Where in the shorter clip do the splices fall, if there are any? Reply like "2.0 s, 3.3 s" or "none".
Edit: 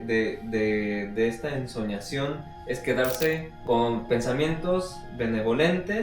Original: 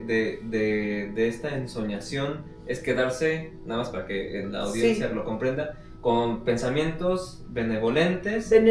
3.5 s